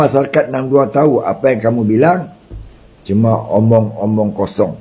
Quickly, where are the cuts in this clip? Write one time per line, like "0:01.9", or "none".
none